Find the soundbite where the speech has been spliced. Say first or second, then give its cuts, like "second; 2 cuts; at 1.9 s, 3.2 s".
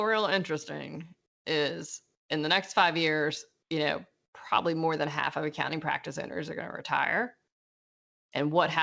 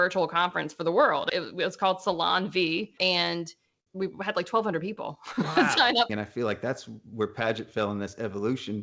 second; 2 cuts; at 1.3 s, 6.1 s